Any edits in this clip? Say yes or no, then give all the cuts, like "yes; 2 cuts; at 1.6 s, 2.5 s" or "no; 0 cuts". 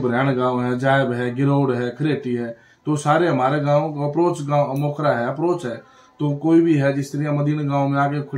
no; 0 cuts